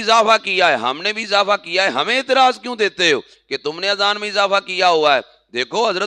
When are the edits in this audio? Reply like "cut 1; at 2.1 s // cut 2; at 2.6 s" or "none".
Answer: none

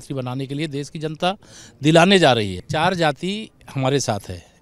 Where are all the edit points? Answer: cut 1; at 2.6 s

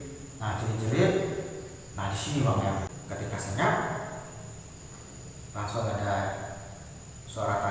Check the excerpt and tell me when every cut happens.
cut 1; at 2.9 s

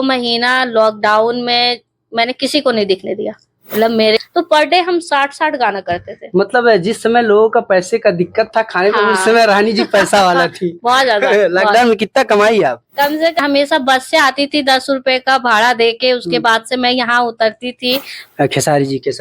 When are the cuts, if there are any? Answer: cut 1; at 4.2 s // cut 2; at 13.4 s // cut 3; at 18.2 s

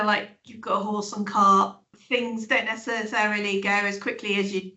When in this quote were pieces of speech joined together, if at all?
cut 1; at 1.9 s

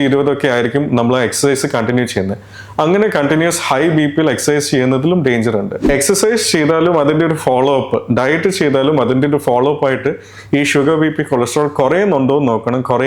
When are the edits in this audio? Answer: cut 1; at 5.8 s

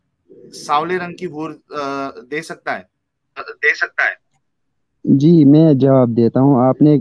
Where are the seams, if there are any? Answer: none

